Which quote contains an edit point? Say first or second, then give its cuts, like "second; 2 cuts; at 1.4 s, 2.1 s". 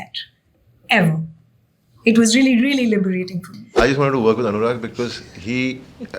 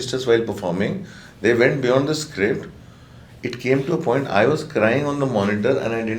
first; 1 cut; at 3.8 s